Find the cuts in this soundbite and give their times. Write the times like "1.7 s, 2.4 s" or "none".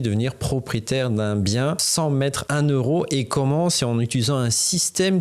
2.2 s